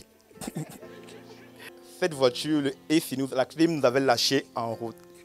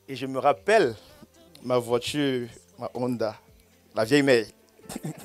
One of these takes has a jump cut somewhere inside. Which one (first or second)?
first